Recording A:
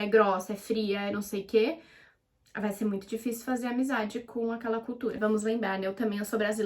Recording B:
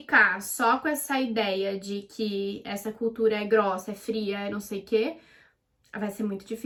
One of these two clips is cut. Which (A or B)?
A